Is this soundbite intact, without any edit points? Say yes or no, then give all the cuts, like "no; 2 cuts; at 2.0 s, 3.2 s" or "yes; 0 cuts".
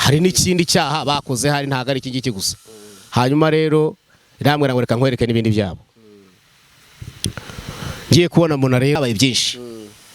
no; 1 cut; at 9.0 s